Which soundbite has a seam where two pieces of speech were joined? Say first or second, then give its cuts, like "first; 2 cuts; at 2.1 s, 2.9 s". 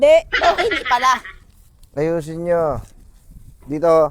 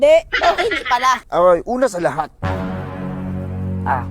second; 1 cut; at 1.2 s